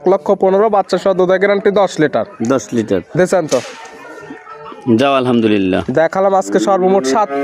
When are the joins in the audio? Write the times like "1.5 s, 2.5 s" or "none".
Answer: none